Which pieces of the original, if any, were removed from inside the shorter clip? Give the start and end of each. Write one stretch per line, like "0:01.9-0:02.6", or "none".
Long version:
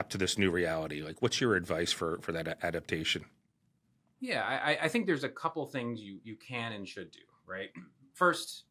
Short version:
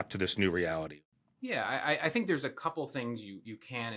0:01.0-0:03.8